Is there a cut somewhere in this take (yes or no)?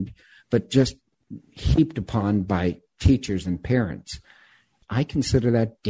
yes